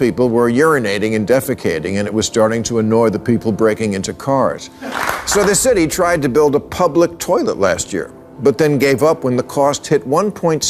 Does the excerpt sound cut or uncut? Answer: cut